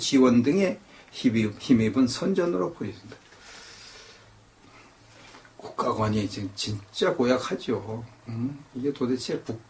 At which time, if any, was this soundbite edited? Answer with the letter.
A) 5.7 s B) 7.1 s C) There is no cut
A